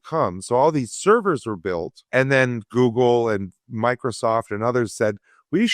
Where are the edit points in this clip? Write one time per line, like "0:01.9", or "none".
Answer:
0:01.9